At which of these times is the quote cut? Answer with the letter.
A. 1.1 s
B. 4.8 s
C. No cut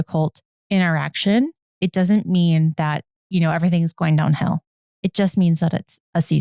B